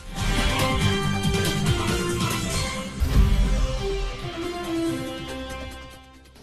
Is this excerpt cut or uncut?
uncut